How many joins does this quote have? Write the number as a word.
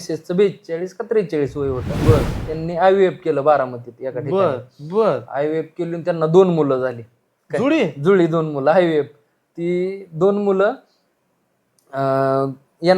zero